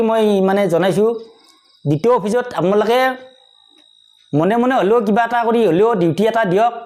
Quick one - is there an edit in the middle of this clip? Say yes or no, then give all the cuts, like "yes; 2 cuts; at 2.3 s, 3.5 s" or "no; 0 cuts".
no; 0 cuts